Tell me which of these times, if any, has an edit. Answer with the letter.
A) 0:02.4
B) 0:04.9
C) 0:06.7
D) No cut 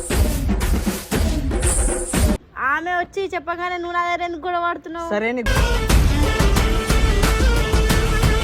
A